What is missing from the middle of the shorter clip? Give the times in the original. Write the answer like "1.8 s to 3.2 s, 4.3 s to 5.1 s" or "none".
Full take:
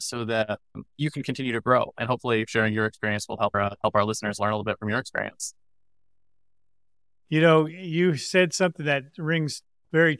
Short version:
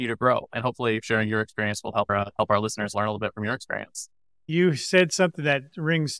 5.8 s to 7.8 s